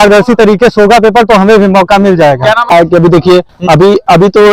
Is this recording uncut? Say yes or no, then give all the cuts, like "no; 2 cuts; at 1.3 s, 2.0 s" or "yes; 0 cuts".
no; 1 cut; at 2.6 s